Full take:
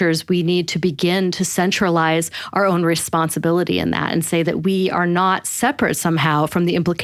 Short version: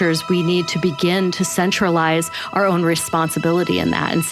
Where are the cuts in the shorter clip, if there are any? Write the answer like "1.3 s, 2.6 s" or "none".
none